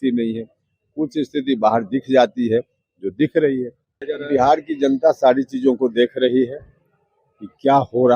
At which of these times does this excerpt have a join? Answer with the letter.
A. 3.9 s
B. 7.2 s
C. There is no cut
A